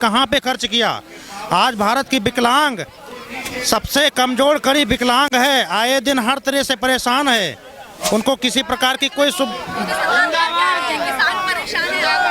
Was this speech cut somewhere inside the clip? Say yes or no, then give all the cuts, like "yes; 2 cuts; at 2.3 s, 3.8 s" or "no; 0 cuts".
no; 0 cuts